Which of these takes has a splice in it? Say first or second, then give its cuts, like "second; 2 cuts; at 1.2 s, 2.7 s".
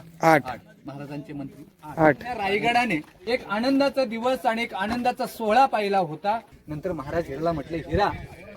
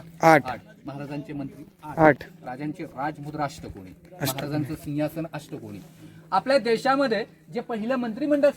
first; 3 cuts; at 2.4 s, 3.1 s, 6.6 s